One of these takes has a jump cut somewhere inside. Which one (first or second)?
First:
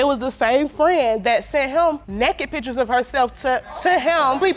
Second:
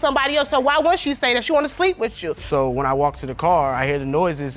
second